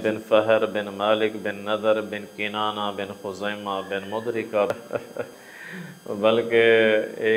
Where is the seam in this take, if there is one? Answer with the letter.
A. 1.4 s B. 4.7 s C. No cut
B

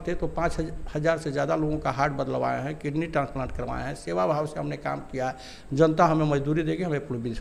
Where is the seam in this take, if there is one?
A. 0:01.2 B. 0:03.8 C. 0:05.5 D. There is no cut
D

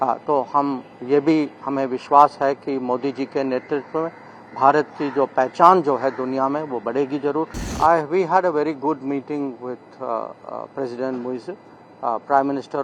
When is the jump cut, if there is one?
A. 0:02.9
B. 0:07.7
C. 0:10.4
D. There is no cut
B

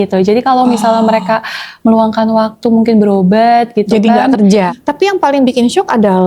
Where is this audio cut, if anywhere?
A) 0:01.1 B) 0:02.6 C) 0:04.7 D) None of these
C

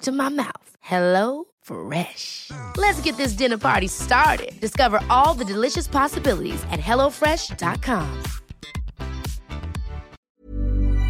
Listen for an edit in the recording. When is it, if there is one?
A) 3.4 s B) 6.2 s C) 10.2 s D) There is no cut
C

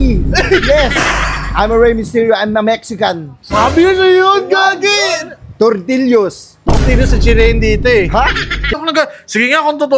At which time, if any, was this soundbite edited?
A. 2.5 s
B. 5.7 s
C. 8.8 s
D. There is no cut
C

